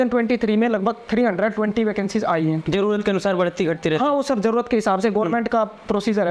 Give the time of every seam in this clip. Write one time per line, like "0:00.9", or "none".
none